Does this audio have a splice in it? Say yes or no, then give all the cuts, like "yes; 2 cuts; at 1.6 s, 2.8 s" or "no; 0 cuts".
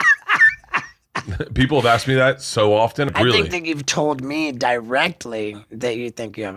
yes; 1 cut; at 3.1 s